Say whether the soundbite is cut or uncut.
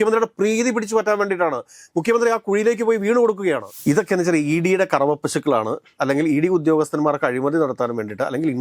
cut